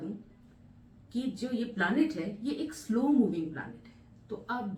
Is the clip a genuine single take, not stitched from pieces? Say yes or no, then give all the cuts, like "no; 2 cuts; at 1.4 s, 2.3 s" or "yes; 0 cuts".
yes; 0 cuts